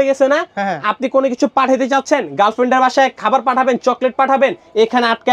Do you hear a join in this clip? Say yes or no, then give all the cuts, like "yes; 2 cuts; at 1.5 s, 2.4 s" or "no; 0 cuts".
no; 0 cuts